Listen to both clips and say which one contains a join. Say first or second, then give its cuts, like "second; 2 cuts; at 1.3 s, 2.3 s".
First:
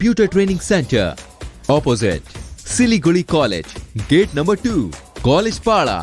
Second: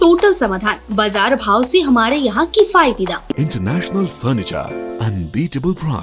second; 1 cut; at 3.3 s